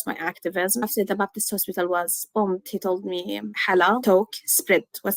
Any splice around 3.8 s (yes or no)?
yes